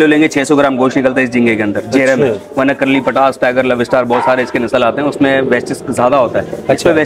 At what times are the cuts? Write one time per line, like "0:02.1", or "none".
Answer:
none